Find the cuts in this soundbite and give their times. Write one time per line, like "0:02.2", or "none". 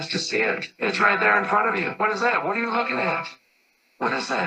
none